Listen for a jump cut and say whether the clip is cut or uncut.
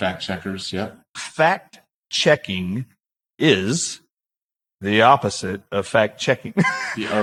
uncut